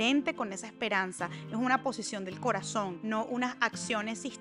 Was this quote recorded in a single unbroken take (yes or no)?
yes